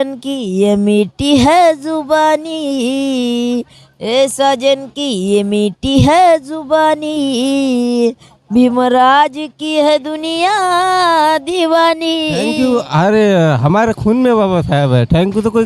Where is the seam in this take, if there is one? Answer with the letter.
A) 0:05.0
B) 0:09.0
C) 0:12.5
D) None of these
C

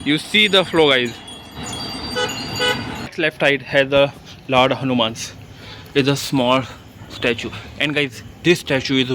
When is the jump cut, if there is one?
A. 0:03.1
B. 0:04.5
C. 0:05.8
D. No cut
A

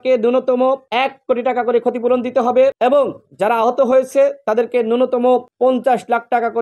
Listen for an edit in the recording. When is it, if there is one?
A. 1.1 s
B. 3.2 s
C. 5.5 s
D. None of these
D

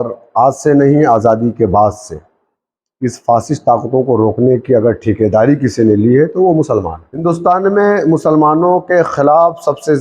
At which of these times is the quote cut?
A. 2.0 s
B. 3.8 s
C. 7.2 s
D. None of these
C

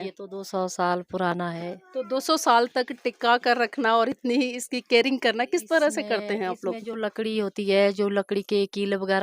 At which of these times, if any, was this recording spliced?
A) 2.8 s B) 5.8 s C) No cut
C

